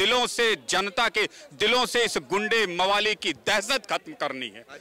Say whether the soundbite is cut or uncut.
uncut